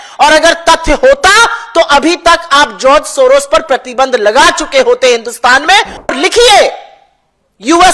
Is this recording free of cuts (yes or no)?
no